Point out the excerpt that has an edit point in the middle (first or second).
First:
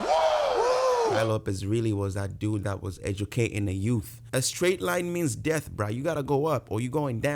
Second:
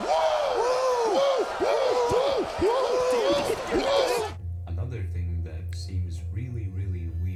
first